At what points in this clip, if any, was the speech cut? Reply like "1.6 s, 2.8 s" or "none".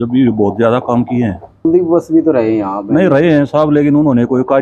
1.6 s